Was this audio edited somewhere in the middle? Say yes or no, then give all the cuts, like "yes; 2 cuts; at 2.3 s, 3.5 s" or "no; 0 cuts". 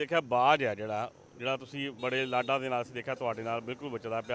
no; 0 cuts